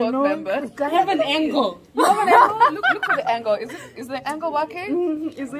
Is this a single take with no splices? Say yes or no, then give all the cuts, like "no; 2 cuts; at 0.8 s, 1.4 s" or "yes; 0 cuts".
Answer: no; 1 cut; at 0.9 s